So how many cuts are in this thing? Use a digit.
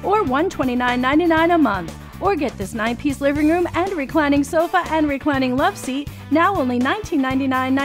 0